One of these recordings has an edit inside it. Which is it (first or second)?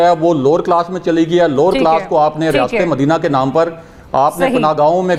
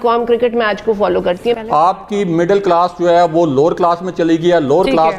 second